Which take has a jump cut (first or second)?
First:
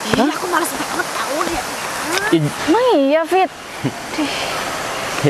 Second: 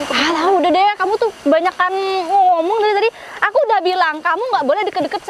first